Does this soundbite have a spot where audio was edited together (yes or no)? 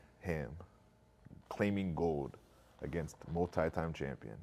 no